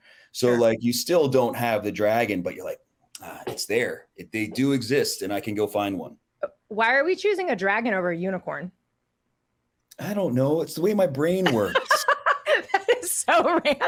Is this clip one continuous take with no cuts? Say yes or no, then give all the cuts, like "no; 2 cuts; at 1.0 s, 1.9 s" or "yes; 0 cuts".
yes; 0 cuts